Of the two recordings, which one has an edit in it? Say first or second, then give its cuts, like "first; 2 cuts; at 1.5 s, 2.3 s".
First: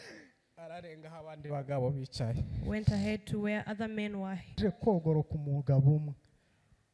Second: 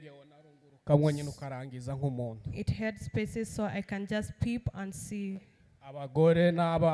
first; 1 cut; at 4.6 s